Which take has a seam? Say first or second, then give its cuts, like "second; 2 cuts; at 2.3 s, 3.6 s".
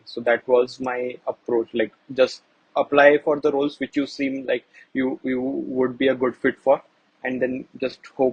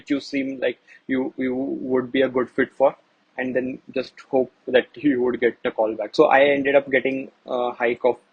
second; 1 cut; at 6.1 s